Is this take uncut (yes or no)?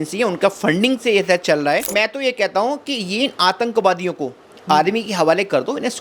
no